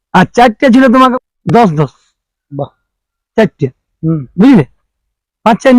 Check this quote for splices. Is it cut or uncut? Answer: cut